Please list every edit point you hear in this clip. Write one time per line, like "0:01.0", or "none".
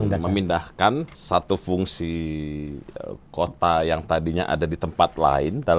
0:01.1